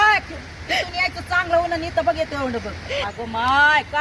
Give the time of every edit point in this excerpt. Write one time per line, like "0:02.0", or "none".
0:03.0